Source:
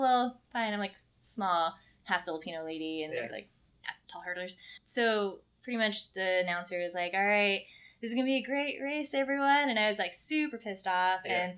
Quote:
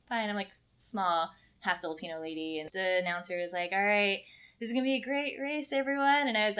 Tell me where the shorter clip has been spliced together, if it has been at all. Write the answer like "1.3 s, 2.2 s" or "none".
2.7 s